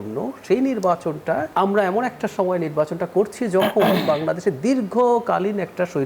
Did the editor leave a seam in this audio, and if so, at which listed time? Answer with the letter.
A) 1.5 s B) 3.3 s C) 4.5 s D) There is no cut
A